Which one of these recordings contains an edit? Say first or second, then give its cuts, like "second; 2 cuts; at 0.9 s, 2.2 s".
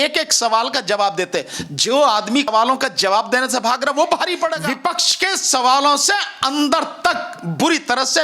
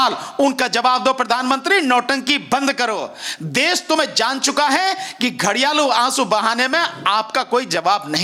first; 1 cut; at 4.7 s